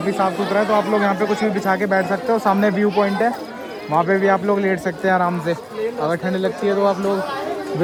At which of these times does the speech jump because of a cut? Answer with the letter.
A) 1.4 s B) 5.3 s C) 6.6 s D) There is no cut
D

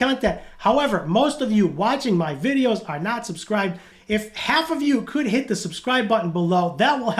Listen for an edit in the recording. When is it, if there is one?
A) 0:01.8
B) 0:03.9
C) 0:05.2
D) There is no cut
B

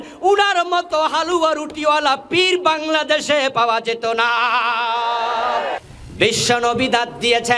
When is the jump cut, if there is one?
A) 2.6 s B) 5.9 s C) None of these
B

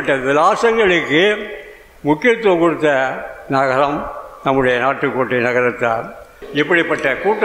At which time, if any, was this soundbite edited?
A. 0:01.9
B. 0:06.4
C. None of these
B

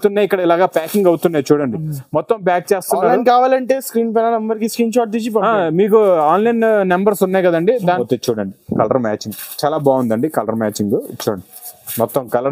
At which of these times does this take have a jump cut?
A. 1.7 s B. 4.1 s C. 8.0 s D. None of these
C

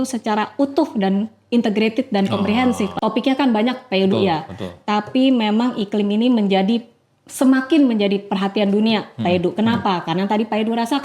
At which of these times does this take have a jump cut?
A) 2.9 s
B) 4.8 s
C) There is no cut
A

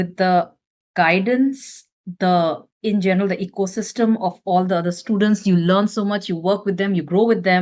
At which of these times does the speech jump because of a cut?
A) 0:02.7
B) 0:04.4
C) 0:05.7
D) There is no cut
D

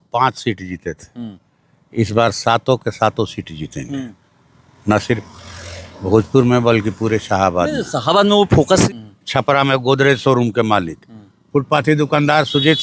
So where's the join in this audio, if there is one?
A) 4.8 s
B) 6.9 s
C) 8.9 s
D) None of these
C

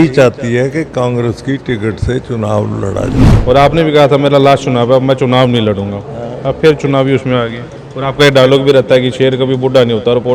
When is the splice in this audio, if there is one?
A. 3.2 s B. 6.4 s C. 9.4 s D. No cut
A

